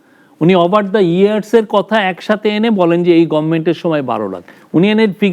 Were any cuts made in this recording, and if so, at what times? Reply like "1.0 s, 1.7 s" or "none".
none